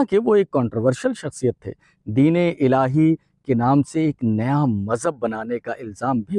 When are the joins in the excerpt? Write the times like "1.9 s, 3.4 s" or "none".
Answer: none